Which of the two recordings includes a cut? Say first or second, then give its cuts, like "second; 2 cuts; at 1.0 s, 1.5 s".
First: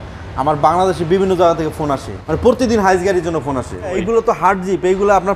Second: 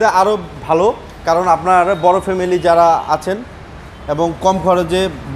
first; 2 cuts; at 2.2 s, 4.0 s